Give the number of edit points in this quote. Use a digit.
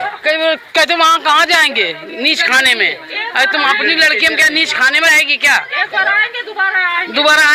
0